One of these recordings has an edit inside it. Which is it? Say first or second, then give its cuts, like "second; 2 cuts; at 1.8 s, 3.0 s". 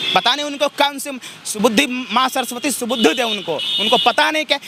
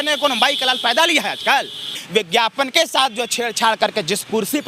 second; 1 cut; at 2.0 s